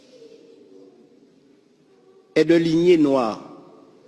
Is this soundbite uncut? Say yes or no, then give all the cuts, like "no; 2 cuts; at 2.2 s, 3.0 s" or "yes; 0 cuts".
yes; 0 cuts